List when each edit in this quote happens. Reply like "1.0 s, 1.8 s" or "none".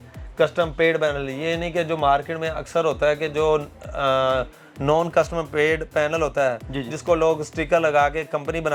none